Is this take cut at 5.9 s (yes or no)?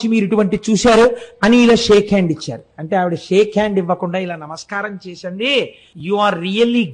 yes